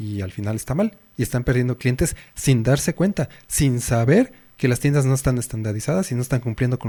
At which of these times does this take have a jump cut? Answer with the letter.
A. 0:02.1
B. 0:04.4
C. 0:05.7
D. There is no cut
D